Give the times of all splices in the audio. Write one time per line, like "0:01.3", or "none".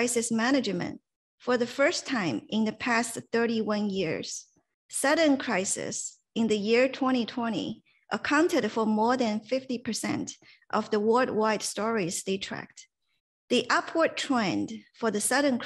none